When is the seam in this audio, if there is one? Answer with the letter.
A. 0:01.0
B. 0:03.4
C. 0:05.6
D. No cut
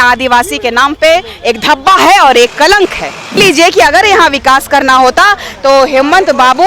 B